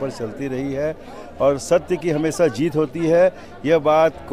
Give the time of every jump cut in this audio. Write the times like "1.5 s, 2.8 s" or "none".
none